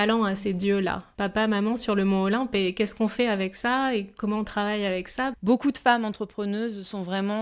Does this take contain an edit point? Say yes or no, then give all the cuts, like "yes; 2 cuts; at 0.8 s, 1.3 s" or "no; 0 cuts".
yes; 2 cuts; at 1.1 s, 5.4 s